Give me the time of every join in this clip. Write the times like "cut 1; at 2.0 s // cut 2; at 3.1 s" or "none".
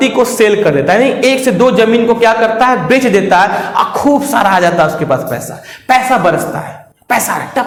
none

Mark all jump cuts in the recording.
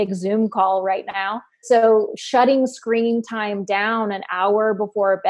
cut 1; at 1.6 s

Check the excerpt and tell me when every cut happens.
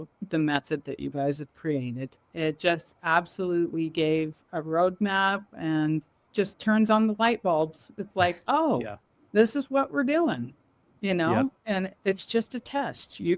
cut 1; at 2.3 s // cut 2; at 6.3 s // cut 3; at 11.9 s

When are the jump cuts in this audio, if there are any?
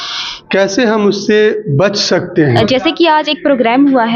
cut 1; at 2.6 s

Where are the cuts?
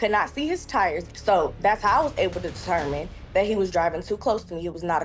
cut 1; at 1.1 s

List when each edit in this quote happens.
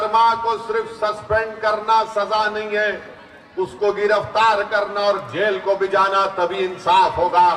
none

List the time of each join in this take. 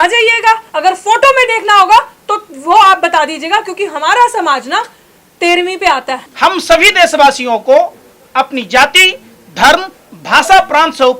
cut 1; at 6.2 s

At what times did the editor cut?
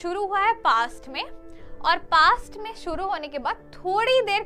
none

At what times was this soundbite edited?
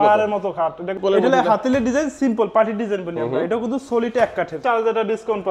cut 1; at 1.0 s // cut 2; at 4.6 s

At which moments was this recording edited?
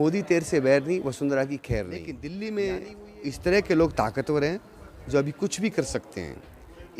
cut 1; at 2.2 s

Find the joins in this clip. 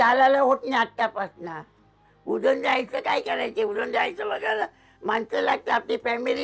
none

